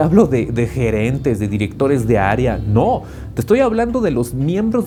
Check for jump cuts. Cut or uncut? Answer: uncut